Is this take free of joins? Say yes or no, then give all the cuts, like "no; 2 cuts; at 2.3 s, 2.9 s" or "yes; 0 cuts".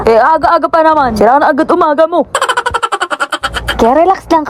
yes; 0 cuts